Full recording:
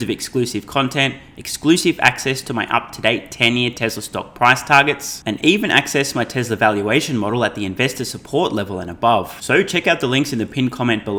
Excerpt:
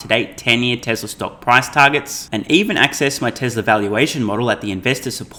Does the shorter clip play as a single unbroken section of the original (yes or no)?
yes